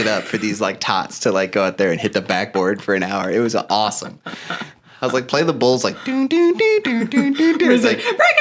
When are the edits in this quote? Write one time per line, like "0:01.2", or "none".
none